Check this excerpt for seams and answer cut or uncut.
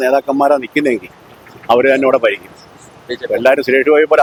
uncut